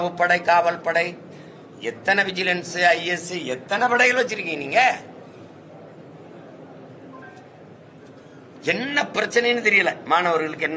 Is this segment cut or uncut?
uncut